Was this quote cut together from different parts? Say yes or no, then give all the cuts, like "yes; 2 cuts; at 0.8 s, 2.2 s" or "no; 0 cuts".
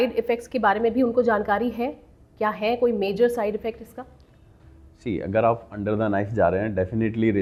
no; 0 cuts